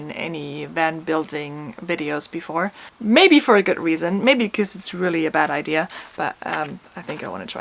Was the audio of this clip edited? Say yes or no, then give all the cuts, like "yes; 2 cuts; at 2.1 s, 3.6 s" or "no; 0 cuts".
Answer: no; 0 cuts